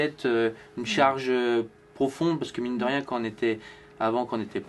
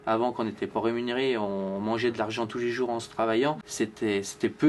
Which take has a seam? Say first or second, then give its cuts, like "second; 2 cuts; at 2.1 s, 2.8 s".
second; 1 cut; at 3.6 s